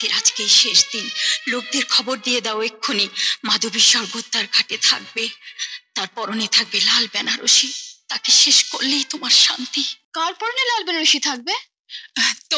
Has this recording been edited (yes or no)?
yes